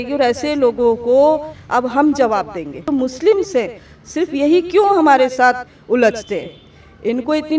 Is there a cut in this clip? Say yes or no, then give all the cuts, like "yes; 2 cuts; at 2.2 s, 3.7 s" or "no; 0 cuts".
yes; 1 cut; at 2.9 s